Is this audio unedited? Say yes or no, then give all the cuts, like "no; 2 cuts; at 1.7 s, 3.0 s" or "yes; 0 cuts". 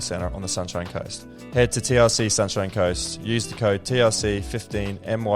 no; 1 cut; at 1.3 s